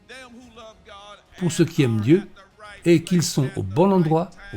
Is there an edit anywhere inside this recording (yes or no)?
yes